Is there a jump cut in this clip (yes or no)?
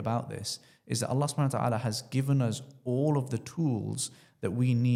no